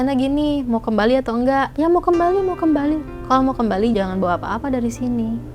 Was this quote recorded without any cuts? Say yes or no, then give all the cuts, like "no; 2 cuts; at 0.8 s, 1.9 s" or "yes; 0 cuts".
no; 2 cuts; at 3.1 s, 3.9 s